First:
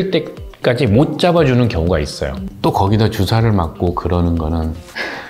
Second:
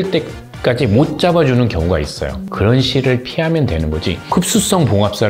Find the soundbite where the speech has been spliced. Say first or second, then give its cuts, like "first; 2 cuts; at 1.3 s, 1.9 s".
first; 1 cut; at 2.4 s